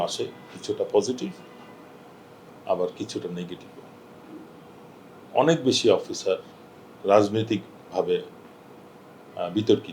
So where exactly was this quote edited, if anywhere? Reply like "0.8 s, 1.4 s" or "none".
none